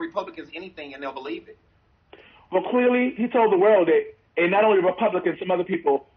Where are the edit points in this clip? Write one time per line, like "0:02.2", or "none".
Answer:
none